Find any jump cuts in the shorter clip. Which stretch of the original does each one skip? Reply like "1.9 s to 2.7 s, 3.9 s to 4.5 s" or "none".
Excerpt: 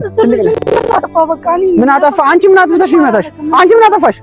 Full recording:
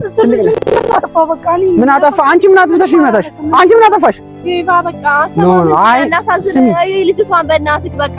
none